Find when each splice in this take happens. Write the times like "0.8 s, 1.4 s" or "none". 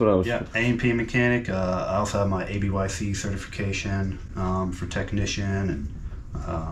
none